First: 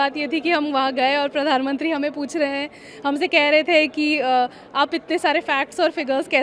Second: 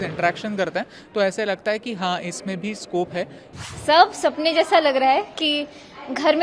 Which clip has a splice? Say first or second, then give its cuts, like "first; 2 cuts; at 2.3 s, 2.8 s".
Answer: second; 1 cut; at 3.7 s